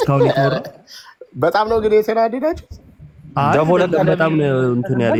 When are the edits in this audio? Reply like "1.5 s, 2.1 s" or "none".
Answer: none